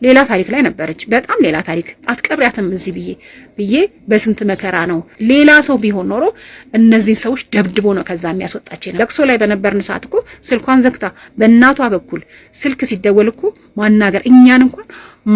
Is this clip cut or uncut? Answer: cut